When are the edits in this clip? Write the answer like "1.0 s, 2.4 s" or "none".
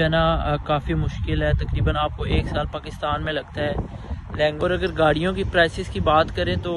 4.6 s